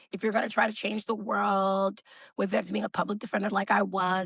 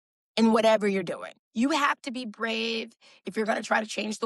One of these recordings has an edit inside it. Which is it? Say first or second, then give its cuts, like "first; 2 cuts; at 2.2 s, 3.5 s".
second; 1 cut; at 1.5 s